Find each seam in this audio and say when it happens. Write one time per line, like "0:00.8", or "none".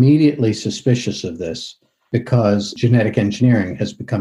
0:02.8

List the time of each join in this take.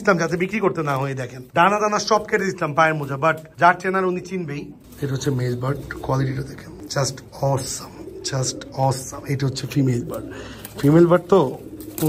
0:04.8
0:06.7

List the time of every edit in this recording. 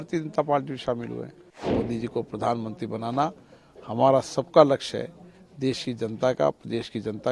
0:01.7

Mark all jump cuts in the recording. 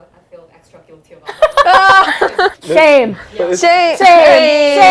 none

